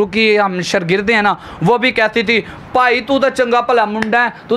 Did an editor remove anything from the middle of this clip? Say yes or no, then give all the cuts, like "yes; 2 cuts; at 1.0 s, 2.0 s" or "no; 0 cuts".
no; 0 cuts